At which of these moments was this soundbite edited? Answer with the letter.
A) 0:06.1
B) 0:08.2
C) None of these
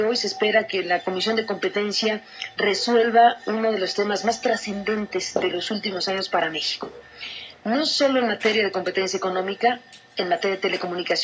B